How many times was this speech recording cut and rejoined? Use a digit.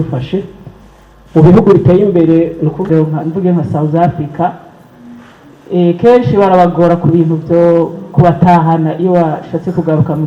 1